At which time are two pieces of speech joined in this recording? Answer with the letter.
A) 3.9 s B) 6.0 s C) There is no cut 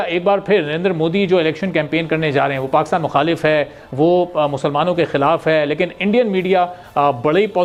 C